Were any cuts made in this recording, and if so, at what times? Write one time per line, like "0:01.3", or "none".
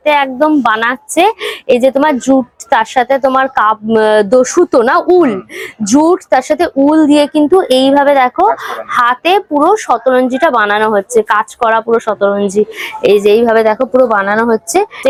none